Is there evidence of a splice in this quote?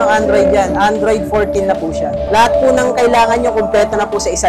yes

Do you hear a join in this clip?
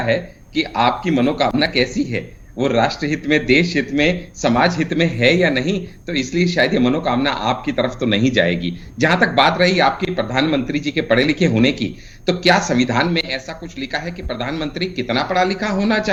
no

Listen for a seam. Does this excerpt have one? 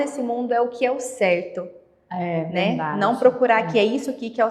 no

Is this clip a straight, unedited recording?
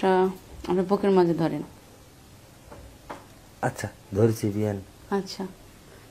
yes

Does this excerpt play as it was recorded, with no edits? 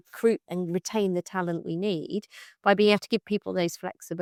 yes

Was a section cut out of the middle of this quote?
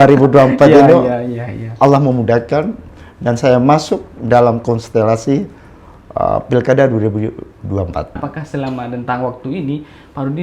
yes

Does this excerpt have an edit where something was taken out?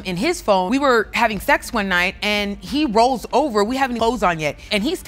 no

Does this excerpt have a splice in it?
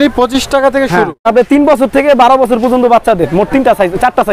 yes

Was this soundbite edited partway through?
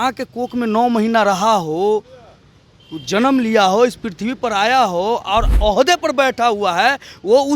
yes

